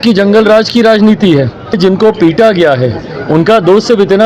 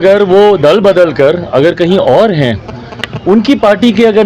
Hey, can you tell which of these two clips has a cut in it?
first; 1 cut; at 1.8 s

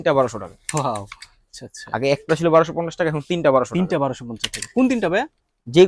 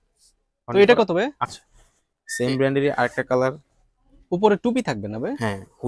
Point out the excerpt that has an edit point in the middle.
second; 1 cut; at 1.4 s

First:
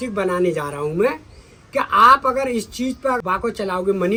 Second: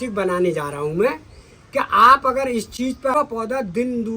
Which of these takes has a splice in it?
second; 1 cut; at 3.1 s

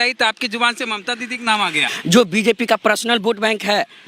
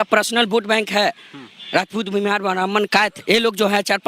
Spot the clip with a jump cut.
first; 1 cut; at 1.8 s

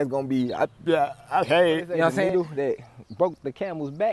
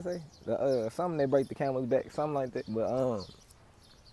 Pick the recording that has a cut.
first; 1 cut; at 2.3 s

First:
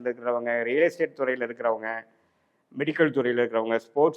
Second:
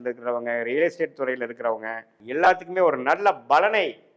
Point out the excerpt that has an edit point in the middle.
second; 1 cut; at 2.1 s

